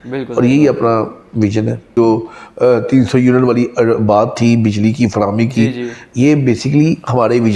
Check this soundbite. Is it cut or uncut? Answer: cut